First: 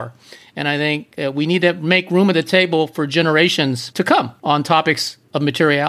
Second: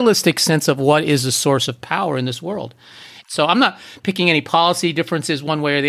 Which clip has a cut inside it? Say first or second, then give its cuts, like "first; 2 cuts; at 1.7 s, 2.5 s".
second; 1 cut; at 3.1 s